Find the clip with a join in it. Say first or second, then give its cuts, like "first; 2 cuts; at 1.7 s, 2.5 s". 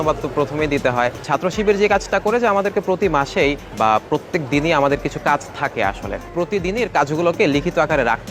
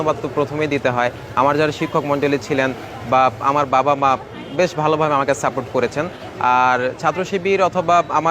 first; 3 cuts; at 1.2 s, 3.7 s, 6.2 s